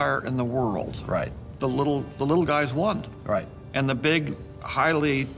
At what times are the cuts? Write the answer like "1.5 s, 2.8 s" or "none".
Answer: 1.4 s